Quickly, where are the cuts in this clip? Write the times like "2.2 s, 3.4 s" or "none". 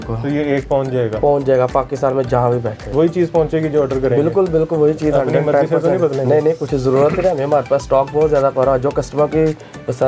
2.9 s